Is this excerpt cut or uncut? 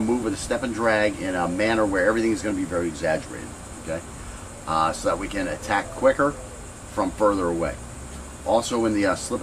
uncut